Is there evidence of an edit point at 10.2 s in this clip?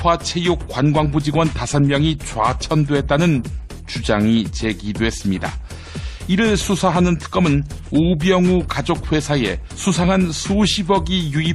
yes; 1 cut; at 10.2 s

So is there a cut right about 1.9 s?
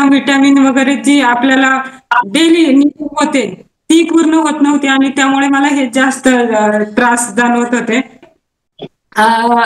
no; 1 cut; at 8.2 s

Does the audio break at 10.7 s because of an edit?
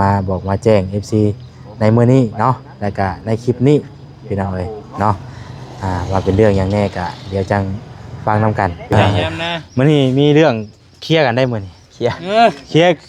no; 1 cut; at 9.1 s

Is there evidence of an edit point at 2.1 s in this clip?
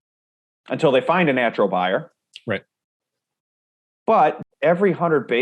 no; 1 cut; at 4.4 s

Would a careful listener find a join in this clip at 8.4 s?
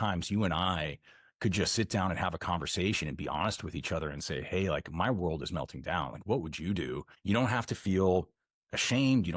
no; 1 cut; at 7.1 s

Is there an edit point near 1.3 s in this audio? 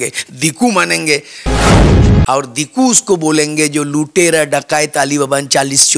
yes; 2 cuts; at 1.3 s, 2.3 s

